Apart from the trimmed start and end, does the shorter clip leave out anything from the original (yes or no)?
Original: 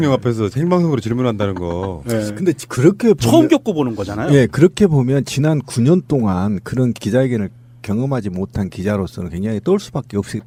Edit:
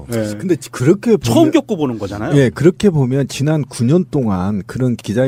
no